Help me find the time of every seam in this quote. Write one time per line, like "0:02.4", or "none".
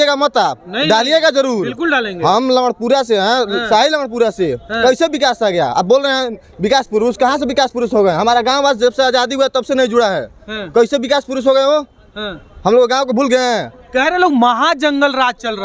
none